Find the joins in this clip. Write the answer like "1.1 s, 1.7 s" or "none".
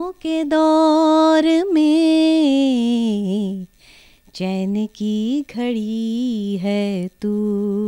none